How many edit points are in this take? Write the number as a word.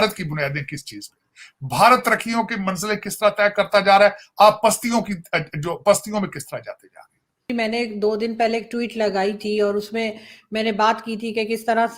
zero